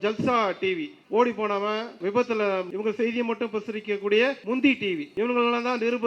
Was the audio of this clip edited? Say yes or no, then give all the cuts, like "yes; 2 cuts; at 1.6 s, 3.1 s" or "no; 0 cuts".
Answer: yes; 5 cuts; at 0.9 s, 2.0 s, 2.7 s, 4.4 s, 5.1 s